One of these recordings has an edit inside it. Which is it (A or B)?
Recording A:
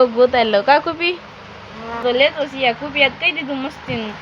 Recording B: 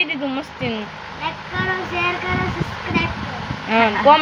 A